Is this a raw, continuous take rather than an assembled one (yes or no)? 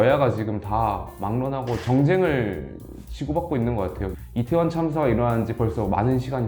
no